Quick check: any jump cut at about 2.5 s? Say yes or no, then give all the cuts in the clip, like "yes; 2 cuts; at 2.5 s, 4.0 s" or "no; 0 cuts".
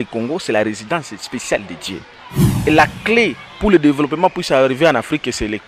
yes; 1 cut; at 2.5 s